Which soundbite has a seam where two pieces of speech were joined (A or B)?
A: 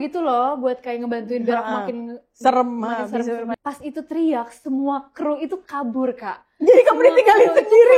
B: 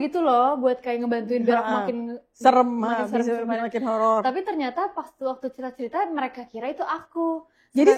A